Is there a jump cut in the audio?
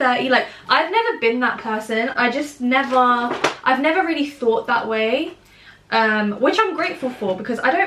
no; 0 cuts

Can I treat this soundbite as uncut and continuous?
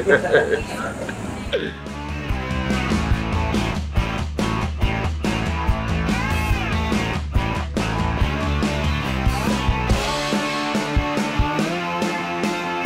yes; 0 cuts

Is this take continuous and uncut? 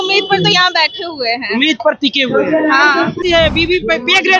no; 1 cut; at 3.2 s

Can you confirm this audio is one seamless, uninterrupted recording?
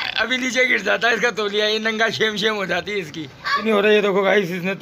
no; 1 cut; at 3.6 s

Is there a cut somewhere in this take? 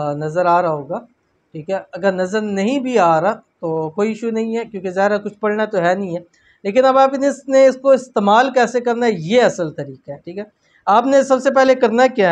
no; 0 cuts

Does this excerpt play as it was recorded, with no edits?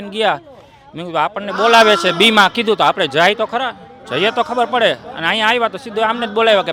yes; 0 cuts

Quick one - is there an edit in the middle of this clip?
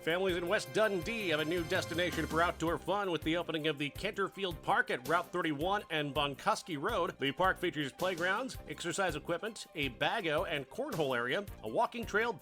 no; 0 cuts

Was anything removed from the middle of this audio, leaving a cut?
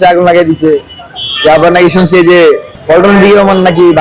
yes; 1 cut; at 2.7 s

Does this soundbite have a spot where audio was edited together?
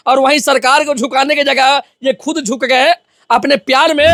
no; 0 cuts

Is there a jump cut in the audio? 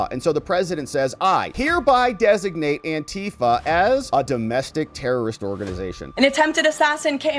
yes; 1 cut; at 6.1 s

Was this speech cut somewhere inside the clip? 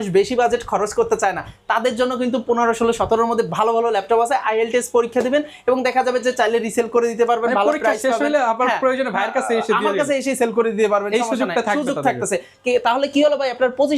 no; 0 cuts

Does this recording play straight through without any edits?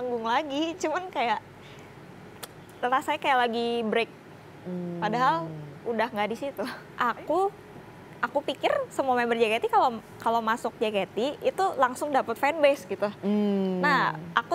no; 1 cut; at 6.8 s

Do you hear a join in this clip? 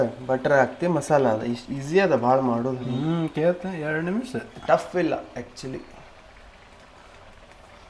no; 0 cuts

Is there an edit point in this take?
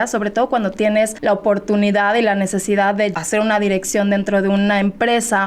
yes; 2 cuts; at 1.1 s, 3.1 s

